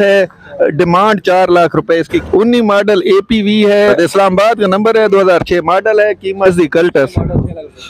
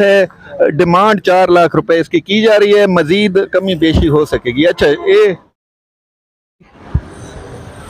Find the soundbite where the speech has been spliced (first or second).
first